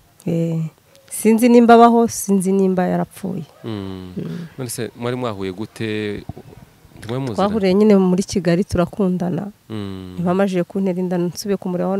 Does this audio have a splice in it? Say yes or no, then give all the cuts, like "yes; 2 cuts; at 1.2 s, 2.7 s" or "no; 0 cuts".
no; 0 cuts